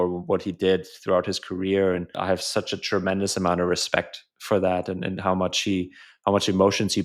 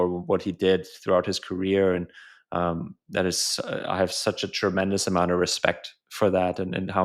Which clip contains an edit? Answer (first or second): first